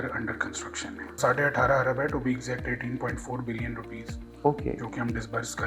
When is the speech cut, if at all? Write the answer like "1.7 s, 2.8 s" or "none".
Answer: 1.2 s